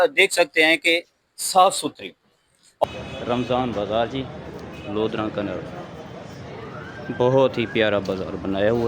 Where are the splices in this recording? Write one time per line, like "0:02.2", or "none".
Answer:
0:02.8